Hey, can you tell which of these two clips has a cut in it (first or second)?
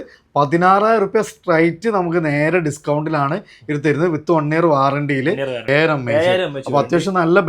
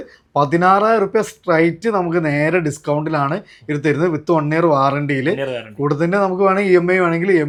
first